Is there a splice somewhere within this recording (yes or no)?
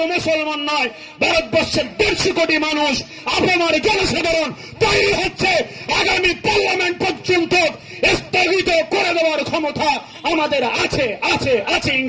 no